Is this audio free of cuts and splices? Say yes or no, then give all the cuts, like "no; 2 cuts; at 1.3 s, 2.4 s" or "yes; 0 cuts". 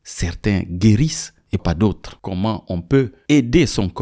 no; 1 cut; at 2.1 s